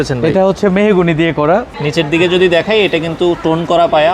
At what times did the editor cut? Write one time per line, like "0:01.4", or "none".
0:01.8

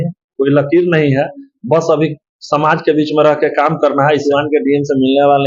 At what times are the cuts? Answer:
0:04.2

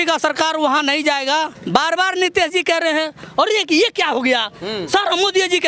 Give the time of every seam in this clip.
0:01.6

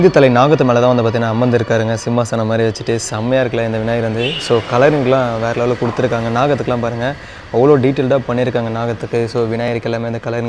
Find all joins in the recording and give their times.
none

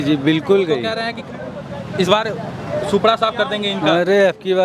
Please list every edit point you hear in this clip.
none

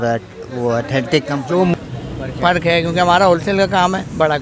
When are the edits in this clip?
0:01.7

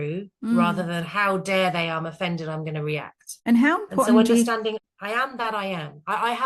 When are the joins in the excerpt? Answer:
0:03.2
0:04.8

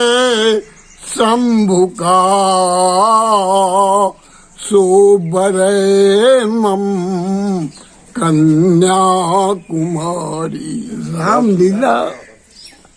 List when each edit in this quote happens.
0:11.1

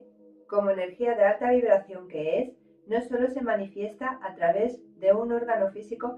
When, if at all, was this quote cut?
none

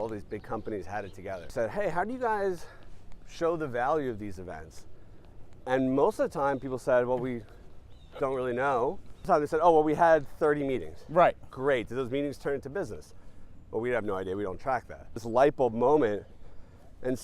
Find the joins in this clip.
0:01.5
0:09.2
0:15.2

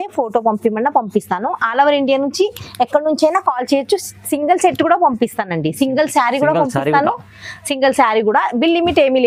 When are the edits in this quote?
none

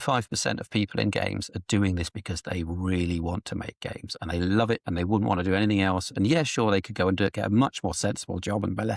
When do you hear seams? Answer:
none

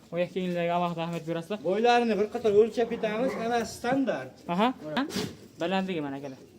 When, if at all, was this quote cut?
0:05.0

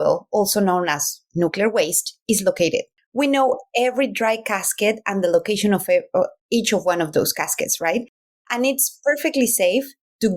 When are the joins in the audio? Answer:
0:02.9

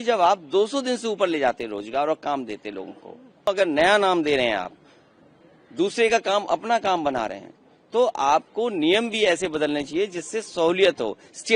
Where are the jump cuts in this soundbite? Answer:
0:03.5

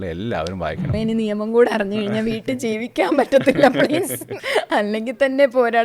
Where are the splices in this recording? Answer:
0:00.9
0:04.3

